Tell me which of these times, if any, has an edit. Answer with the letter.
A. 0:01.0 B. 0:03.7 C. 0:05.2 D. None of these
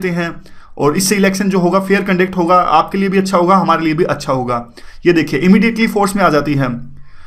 B